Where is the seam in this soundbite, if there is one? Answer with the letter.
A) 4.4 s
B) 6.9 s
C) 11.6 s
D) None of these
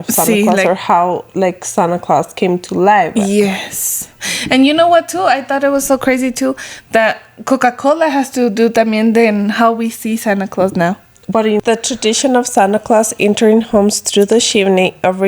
C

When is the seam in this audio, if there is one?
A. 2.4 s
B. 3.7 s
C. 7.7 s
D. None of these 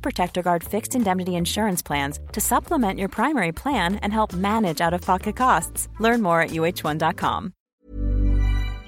C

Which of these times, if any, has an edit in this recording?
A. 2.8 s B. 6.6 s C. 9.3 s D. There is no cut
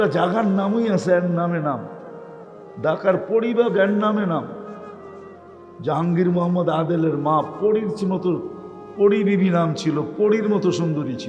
D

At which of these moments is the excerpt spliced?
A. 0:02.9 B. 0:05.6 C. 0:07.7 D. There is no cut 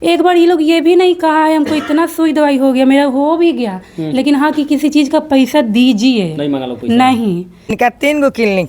C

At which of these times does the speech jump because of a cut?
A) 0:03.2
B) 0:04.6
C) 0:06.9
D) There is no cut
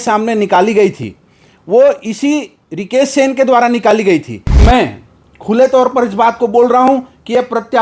B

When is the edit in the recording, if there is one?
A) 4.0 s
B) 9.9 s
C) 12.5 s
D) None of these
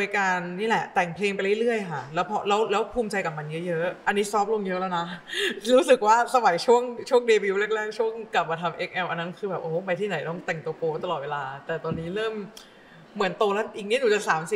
A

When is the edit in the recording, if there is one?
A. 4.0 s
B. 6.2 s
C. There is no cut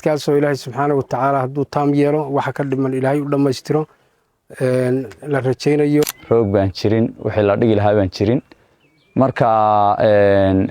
B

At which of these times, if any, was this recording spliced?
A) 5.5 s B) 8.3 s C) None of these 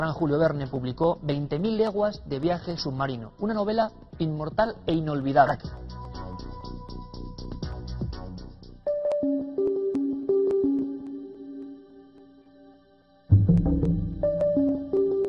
C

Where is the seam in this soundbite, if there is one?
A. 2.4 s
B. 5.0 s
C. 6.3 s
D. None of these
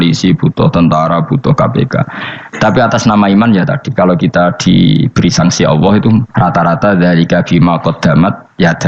C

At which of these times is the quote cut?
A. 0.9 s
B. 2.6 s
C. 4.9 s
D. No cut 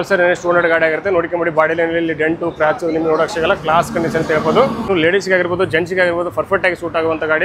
C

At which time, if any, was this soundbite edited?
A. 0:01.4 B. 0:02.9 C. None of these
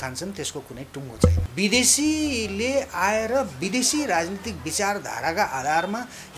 A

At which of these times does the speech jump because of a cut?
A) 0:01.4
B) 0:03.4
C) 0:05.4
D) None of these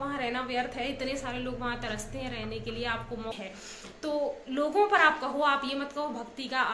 B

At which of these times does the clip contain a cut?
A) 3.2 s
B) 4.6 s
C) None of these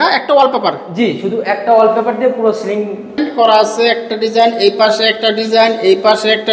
A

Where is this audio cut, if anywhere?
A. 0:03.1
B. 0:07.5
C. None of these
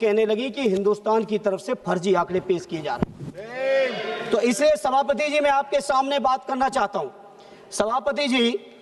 C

